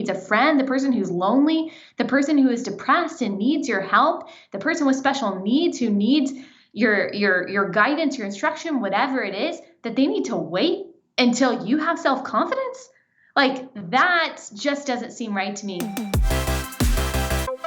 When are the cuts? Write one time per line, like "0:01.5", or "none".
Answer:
0:16.0

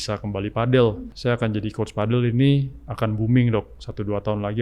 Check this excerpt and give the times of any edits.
0:01.1

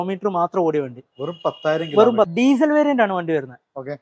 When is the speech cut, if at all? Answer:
0:02.3

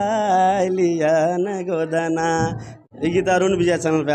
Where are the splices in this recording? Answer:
0:02.8

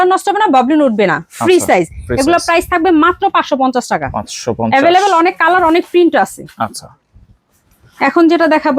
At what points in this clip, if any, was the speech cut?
none

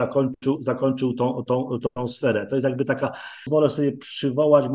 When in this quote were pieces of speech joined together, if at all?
0:03.5

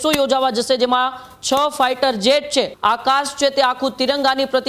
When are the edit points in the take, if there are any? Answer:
0:02.7

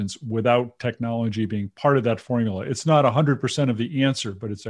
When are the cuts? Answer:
none

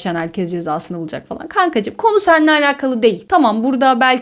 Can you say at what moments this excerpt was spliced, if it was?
none

